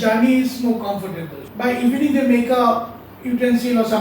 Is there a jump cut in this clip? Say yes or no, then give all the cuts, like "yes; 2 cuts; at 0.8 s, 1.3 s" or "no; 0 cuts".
yes; 1 cut; at 1.4 s